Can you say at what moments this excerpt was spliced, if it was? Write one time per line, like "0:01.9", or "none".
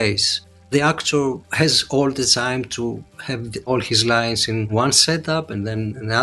none